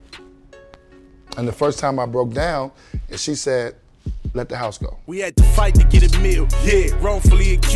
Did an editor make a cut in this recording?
yes; 1 cut; at 4.9 s

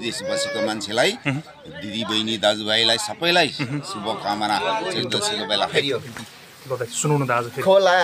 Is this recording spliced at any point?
yes; 1 cut; at 5.7 s

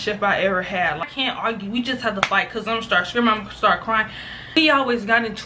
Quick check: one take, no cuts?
no; 2 cuts; at 1.1 s, 4.6 s

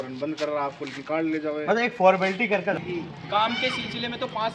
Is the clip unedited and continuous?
no; 1 cut; at 2.7 s

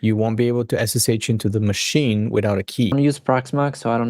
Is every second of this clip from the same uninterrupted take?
no; 1 cut; at 3.2 s

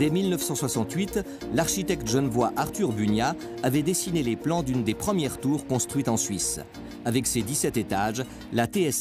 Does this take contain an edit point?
no; 0 cuts

